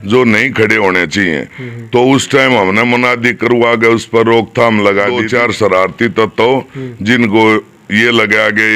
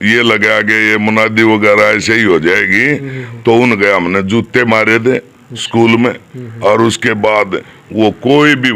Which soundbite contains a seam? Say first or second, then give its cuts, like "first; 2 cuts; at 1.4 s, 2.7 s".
first; 1 cut; at 5.2 s